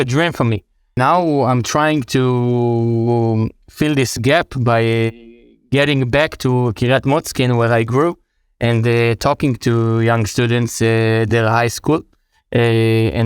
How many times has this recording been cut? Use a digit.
1